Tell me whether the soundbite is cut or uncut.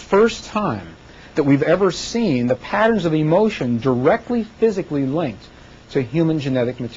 uncut